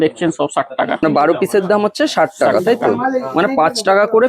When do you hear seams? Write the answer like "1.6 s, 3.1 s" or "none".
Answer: 1.0 s

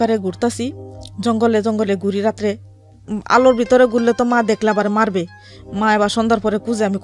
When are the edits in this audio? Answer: none

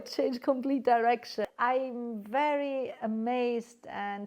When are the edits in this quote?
1.4 s

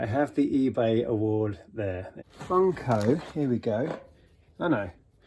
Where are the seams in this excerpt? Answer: 2.1 s

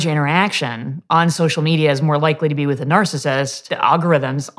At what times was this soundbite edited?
3.7 s

